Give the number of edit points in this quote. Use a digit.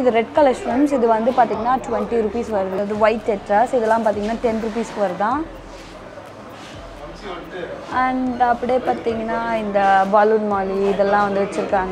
1